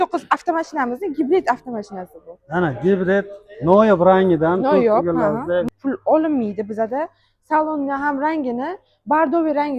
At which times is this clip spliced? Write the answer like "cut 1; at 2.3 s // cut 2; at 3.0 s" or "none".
cut 1; at 5.7 s